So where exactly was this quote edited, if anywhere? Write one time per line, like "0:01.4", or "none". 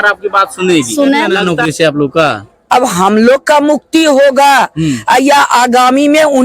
0:01.4